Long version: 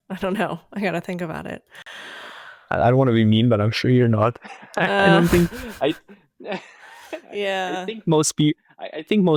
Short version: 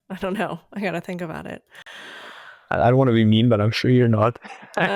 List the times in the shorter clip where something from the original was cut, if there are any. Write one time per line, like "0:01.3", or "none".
none